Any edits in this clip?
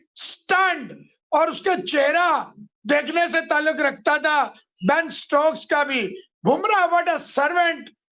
no; 0 cuts

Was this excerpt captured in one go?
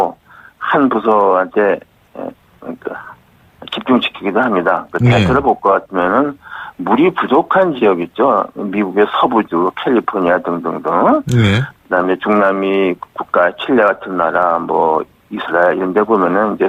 yes; 0 cuts

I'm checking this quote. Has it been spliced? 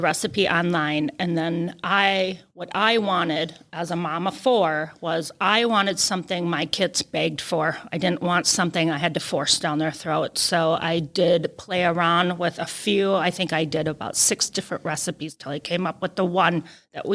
no; 0 cuts

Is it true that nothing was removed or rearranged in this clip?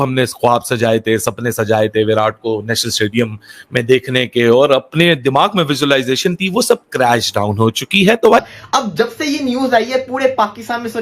no; 1 cut; at 8.4 s

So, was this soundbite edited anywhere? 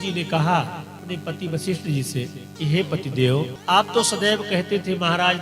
yes; 3 cuts; at 1.0 s, 2.4 s, 3.6 s

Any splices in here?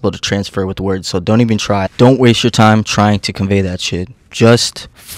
yes; 1 cut; at 1.9 s

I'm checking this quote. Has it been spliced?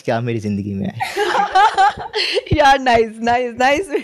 no; 0 cuts

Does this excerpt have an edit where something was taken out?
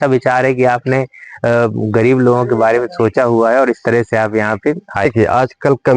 yes; 1 cut; at 5.0 s

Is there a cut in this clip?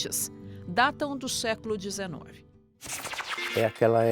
yes; 1 cut; at 3.0 s

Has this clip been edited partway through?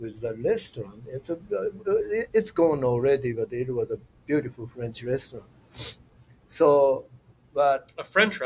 no; 0 cuts

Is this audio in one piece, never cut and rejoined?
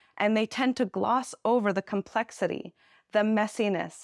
yes; 0 cuts

